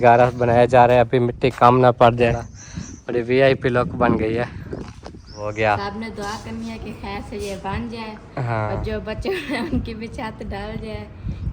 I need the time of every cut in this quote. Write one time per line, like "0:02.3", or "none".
0:02.5
0:05.4